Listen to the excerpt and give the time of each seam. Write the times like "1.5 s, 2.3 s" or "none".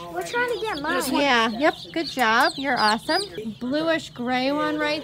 3.4 s